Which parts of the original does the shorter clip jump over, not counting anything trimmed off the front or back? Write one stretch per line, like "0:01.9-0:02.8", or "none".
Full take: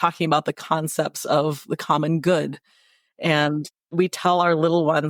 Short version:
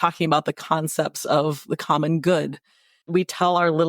0:02.9-0:03.8